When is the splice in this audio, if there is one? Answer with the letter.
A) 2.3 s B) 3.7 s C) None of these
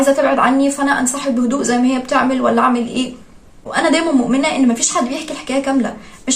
B